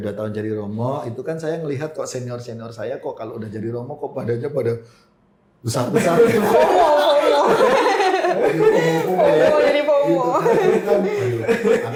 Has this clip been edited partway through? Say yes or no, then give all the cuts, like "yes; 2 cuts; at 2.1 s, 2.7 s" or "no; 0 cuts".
no; 0 cuts